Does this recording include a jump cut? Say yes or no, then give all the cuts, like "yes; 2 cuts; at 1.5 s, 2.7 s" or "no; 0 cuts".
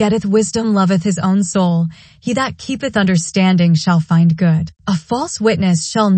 yes; 1 cut; at 4.7 s